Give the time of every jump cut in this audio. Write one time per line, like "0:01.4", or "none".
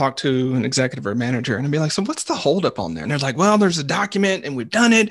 0:03.0